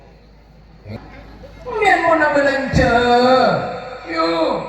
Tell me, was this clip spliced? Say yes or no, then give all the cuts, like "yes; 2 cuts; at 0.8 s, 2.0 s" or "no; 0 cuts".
yes; 1 cut; at 0.9 s